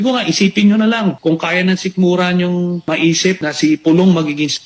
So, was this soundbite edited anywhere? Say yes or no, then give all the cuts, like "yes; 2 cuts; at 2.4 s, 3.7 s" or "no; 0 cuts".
yes; 2 cuts; at 1.2 s, 3.2 s